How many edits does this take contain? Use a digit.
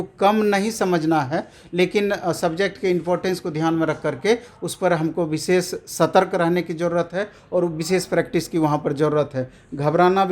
0